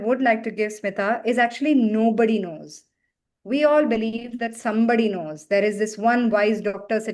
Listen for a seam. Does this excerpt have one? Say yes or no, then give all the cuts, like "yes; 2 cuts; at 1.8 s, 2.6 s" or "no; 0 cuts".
no; 0 cuts